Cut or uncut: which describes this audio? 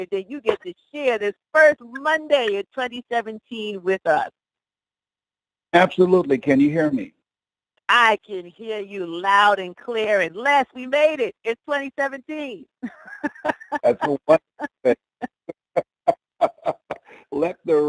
cut